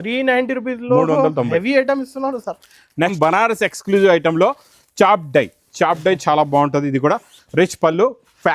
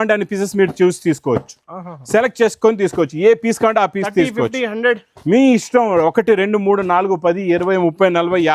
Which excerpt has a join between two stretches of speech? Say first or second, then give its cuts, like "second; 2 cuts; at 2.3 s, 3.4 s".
first; 1 cut; at 3.1 s